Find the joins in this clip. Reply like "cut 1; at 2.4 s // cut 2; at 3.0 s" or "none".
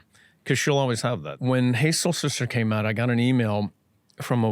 cut 1; at 1.4 s